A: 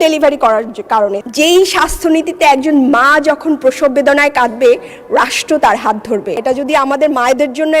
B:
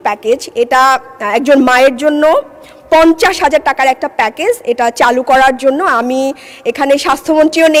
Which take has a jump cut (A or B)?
A